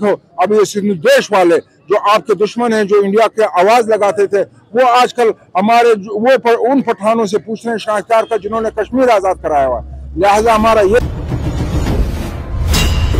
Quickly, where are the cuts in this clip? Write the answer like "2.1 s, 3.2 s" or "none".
11.0 s